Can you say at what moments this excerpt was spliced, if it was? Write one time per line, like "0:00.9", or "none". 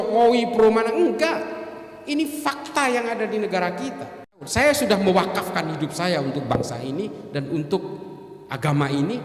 0:04.5